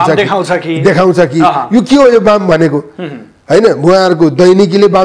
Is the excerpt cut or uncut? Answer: uncut